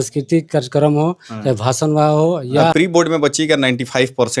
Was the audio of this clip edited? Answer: yes; 1 cut; at 2.7 s

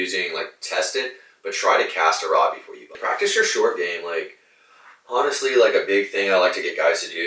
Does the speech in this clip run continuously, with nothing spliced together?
no; 1 cut; at 3.0 s

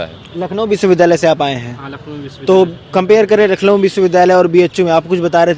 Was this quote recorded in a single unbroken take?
yes; 0 cuts

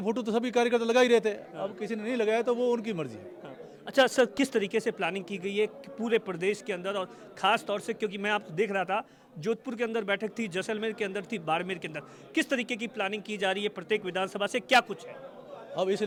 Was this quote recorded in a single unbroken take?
yes; 0 cuts

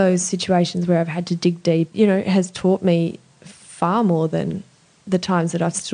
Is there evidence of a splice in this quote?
yes; 1 cut; at 1.9 s

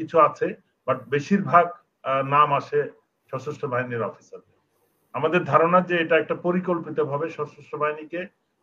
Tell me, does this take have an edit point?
no; 0 cuts

